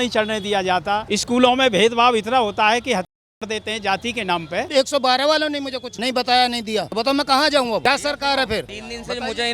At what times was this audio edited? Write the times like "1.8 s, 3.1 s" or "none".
4.6 s